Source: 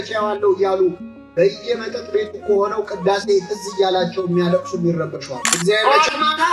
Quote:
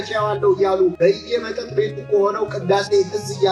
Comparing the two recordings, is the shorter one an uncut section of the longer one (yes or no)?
no